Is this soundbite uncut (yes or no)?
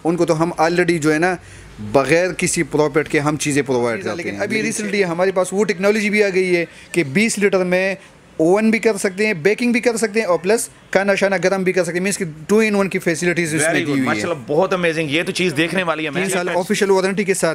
no